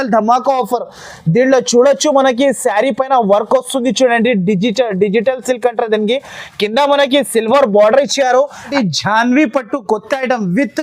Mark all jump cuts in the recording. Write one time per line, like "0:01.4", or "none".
0:08.7